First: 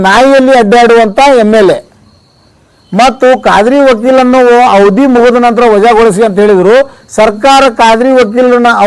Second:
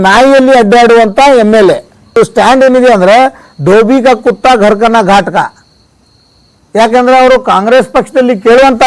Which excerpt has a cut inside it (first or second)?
second